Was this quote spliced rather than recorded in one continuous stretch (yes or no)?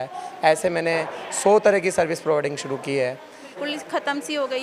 yes